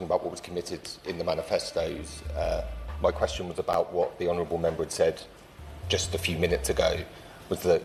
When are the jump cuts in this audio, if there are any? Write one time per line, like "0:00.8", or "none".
none